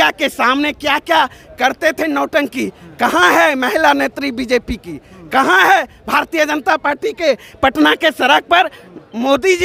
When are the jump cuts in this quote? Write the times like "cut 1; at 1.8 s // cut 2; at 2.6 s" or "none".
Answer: none